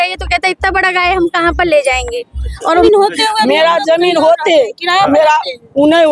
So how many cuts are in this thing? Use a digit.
1